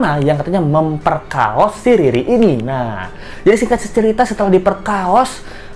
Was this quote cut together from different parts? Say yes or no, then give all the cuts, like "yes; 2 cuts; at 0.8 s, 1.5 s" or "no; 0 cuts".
no; 0 cuts